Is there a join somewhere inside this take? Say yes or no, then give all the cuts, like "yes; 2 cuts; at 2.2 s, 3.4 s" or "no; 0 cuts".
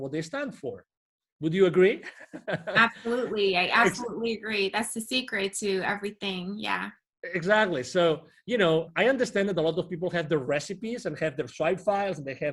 no; 0 cuts